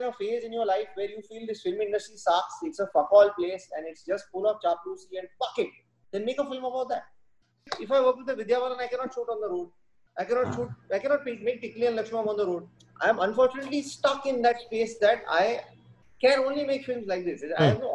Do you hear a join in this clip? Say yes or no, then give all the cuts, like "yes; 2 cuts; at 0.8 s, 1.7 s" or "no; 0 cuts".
yes; 2 cuts; at 7.7 s, 12.7 s